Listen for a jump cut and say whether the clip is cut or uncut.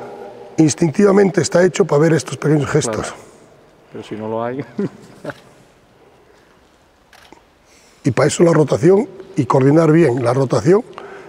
uncut